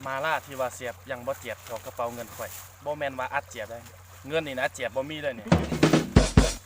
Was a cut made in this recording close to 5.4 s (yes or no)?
yes